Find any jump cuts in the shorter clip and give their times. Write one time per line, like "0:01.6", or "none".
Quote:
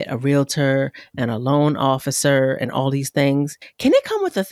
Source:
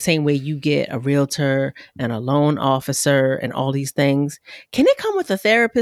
0:03.6